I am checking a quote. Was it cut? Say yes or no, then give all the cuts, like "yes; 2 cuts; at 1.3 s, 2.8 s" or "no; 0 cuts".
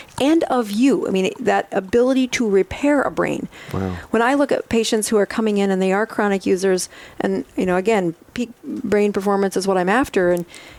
no; 0 cuts